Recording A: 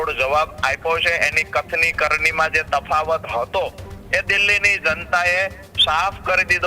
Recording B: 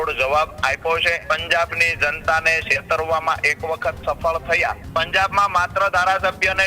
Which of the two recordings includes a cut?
B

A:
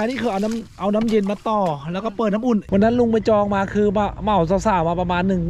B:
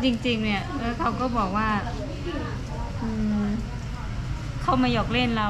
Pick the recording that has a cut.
A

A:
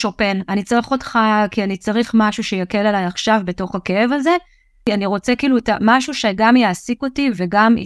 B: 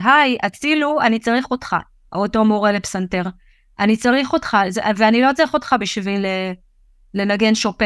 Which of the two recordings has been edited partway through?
A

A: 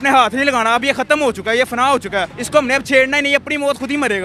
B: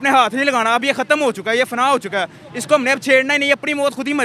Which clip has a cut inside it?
A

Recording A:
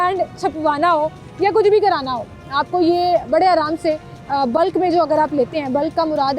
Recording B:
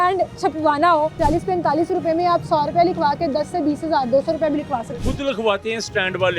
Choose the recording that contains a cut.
B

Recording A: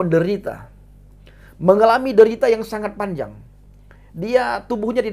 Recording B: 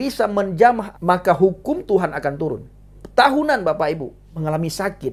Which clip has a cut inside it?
B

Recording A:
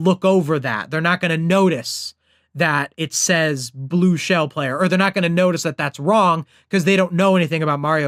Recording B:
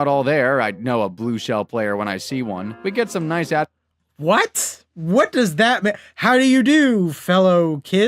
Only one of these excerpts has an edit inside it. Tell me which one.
B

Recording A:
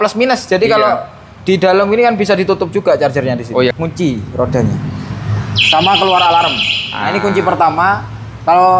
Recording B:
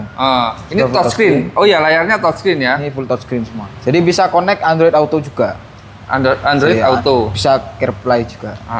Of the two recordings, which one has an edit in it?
A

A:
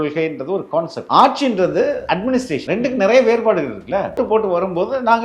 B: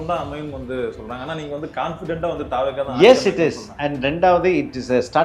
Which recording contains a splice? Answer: A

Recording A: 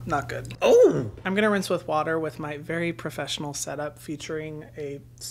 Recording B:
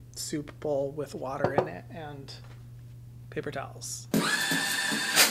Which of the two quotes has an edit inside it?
A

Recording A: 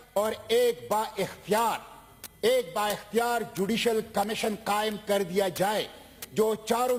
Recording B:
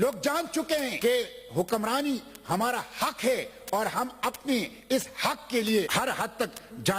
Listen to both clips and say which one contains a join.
B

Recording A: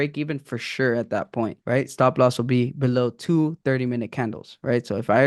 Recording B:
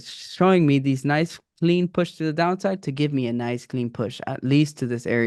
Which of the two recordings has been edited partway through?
A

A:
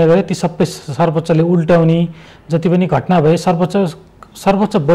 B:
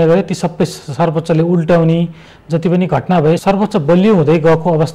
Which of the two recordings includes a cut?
B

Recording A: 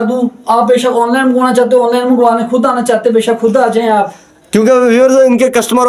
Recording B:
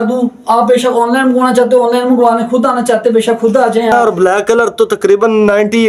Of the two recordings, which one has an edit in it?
B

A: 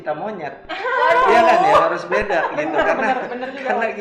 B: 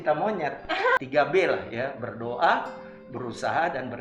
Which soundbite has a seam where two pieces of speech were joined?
B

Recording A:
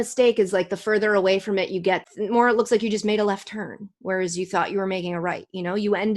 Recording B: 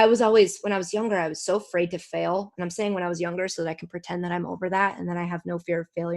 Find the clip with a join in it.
A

